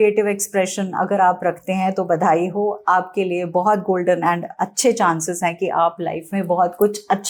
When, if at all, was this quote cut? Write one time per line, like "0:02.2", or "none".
none